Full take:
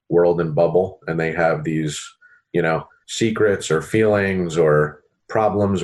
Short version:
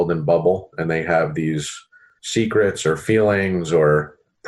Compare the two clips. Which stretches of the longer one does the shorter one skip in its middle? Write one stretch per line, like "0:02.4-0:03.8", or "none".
0:02.4-0:02.9